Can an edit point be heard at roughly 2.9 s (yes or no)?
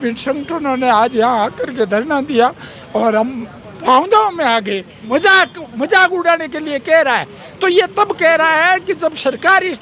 no